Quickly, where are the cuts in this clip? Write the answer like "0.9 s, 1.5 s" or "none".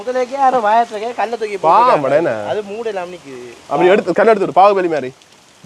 none